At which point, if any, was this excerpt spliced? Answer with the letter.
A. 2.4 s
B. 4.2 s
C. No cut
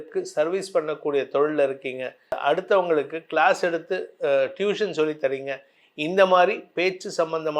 A